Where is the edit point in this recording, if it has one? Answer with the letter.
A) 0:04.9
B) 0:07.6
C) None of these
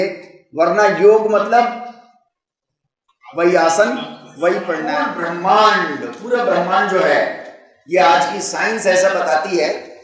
A